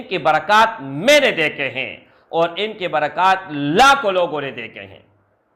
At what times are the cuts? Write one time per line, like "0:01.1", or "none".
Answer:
none